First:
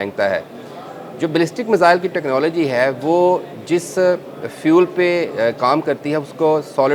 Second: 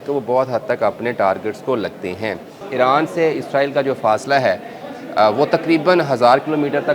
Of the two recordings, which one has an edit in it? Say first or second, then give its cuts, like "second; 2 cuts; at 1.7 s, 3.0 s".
second; 1 cut; at 2.5 s